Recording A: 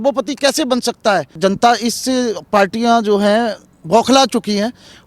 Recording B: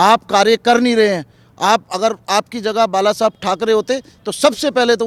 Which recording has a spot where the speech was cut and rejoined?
A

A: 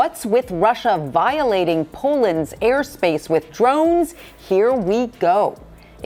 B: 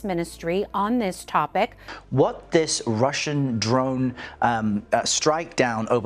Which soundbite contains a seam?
B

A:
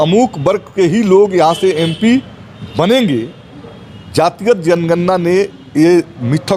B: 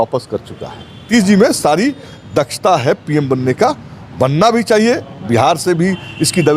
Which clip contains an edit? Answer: B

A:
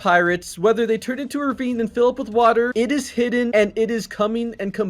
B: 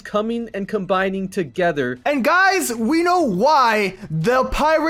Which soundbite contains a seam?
A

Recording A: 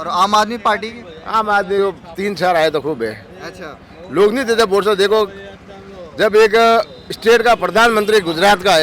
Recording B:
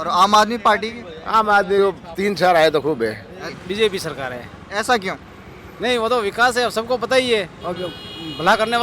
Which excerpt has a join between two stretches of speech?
B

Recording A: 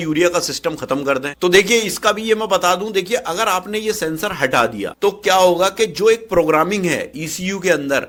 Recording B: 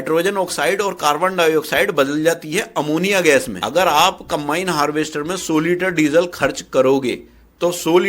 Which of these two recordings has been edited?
B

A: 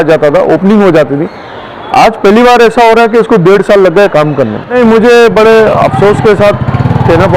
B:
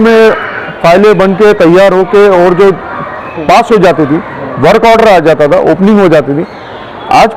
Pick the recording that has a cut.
A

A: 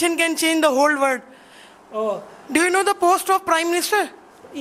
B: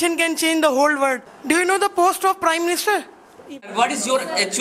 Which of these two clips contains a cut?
B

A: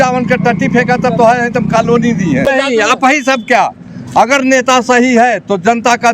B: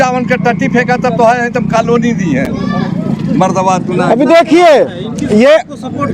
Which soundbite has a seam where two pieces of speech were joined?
A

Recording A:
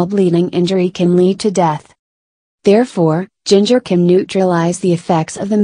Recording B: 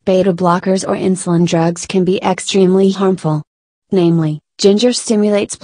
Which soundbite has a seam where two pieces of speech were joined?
A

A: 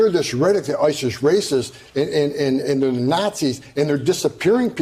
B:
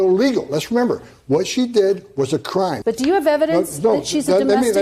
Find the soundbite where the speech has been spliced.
B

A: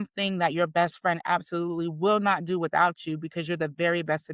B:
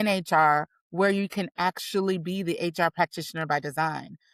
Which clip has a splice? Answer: B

